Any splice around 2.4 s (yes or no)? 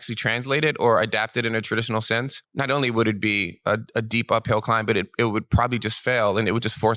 yes